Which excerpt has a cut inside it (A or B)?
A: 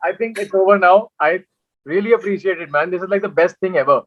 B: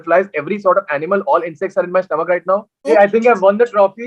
B